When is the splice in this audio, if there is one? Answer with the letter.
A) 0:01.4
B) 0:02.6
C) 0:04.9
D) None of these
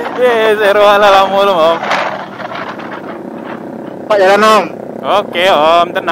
B